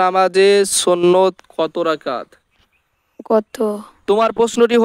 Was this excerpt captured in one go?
no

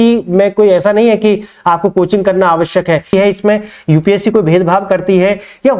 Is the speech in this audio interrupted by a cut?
yes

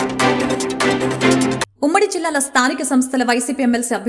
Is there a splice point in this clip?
yes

